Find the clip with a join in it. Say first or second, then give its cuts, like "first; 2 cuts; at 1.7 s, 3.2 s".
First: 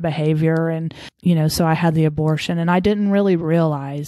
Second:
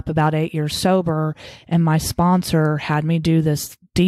first; 1 cut; at 1.1 s